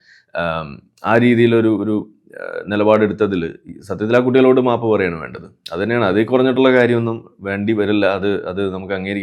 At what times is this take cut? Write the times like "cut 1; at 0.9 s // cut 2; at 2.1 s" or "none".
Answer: none